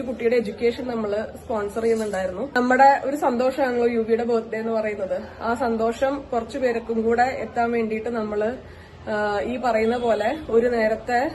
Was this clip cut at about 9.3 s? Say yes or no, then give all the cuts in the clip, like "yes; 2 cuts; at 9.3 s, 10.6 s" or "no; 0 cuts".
no; 1 cut; at 2.5 s